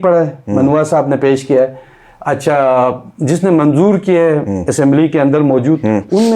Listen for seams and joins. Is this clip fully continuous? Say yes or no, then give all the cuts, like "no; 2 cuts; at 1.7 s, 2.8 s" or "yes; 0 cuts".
yes; 0 cuts